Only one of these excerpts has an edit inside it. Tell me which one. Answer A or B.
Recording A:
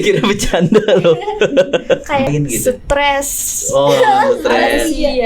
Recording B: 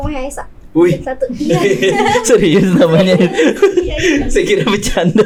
A